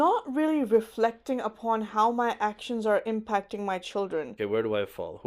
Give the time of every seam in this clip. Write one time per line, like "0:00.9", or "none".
0:04.4